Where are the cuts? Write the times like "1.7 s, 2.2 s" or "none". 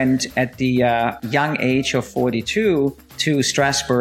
1.2 s, 3.1 s